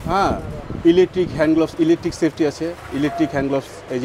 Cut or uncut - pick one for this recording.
uncut